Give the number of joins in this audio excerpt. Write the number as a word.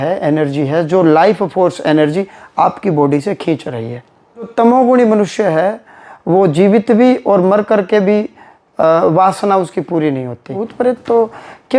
two